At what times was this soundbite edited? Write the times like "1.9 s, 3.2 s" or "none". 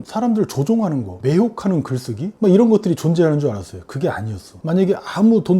4.6 s